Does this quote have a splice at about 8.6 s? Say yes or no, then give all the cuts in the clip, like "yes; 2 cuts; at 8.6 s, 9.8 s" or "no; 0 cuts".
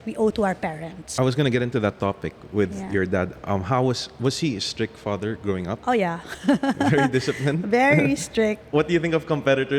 yes; 2 cuts; at 1.0 s, 8.6 s